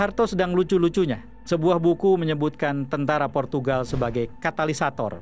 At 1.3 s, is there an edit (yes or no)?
yes